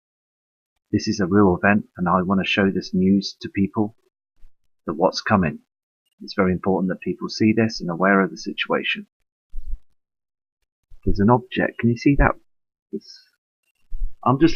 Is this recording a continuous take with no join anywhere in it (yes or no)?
yes